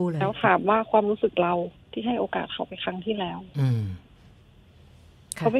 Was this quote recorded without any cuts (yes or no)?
yes